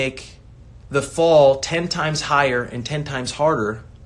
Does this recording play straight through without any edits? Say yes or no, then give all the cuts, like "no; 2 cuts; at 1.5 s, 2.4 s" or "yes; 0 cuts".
yes; 0 cuts